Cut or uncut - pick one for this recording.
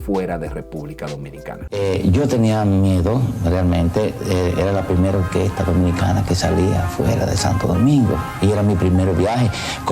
cut